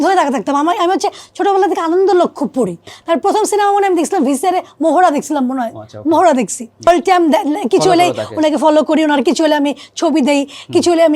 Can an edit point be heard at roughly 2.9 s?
yes; 2 cuts; at 2.9 s, 6.9 s

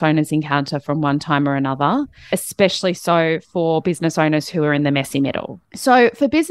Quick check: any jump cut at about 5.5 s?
yes; 1 cut; at 5.5 s

